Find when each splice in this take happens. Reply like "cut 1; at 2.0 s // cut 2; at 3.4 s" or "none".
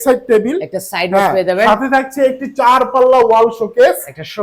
none